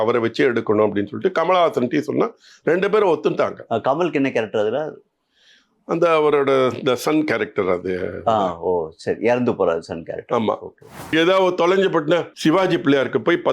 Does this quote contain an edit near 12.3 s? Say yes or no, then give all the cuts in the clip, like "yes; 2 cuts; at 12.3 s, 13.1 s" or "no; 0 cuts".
yes; 2 cuts; at 11.1 s, 12.3 s